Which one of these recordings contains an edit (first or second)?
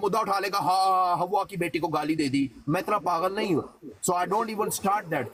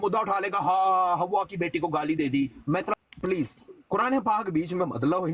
second